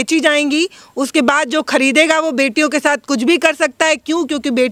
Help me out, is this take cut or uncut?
uncut